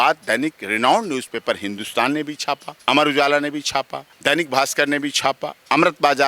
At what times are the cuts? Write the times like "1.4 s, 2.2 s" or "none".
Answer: 2.7 s, 4.0 s